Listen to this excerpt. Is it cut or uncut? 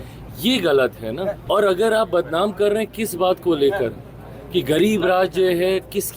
cut